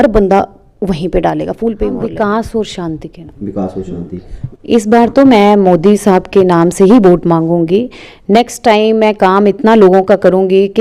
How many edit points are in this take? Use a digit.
2